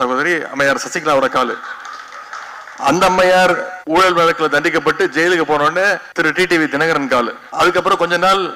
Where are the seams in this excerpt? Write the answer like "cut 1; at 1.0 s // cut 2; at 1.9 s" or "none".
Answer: cut 1; at 3.7 s // cut 2; at 6.1 s // cut 3; at 7.4 s